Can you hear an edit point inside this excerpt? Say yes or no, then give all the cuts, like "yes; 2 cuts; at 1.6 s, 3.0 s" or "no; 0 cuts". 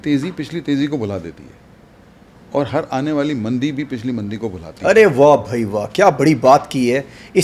no; 0 cuts